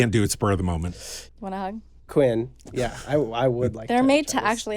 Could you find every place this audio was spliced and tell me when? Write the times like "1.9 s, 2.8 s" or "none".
1.1 s